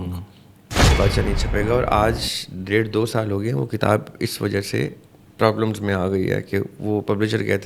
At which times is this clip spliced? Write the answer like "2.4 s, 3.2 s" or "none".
1.0 s